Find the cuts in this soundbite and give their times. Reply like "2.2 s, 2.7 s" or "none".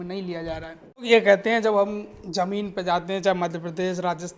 1.1 s